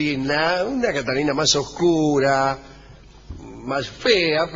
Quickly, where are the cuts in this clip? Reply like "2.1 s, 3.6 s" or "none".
none